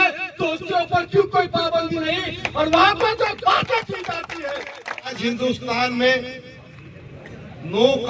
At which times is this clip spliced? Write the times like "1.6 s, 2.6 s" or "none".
5.2 s